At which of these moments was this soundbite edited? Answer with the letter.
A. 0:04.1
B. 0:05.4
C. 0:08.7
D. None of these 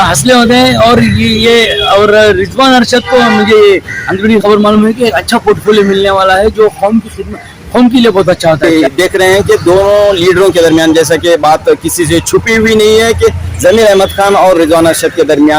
C